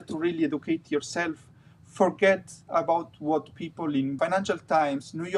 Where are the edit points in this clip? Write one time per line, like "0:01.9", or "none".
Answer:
0:04.1